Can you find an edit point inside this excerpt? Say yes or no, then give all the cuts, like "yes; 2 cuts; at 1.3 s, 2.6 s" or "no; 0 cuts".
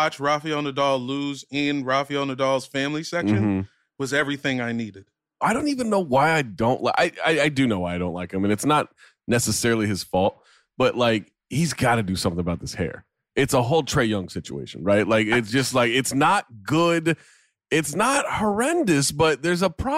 yes; 1 cut; at 5.4 s